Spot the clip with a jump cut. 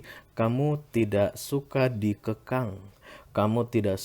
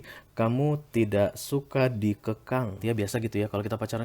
second; 1 cut; at 2.8 s

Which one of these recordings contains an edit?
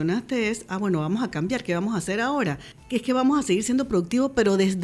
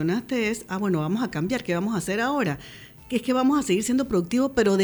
first; 1 cut; at 2.7 s

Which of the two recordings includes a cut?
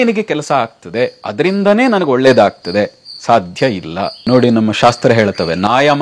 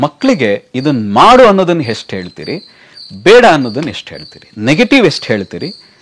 first; 2 cuts; at 1.2 s, 4.2 s

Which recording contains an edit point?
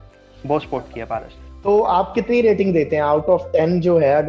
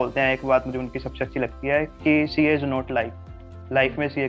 first; 1 cut; at 1.4 s

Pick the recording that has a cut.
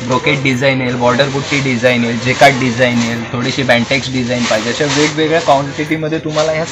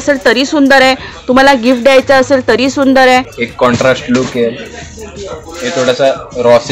second; 1 cut; at 3.4 s

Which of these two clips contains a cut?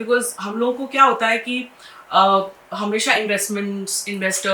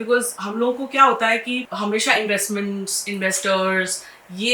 second; 1 cut; at 1.7 s

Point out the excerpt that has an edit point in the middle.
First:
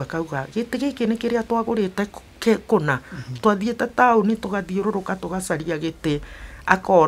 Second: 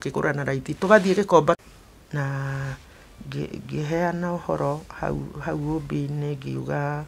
second; 1 cut; at 1.6 s

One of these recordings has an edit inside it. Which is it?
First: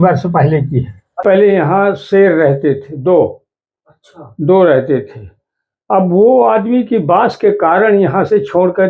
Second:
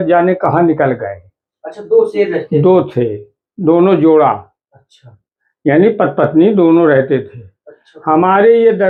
first; 1 cut; at 1.2 s

